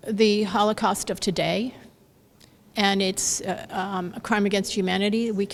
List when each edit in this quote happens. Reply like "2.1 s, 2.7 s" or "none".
none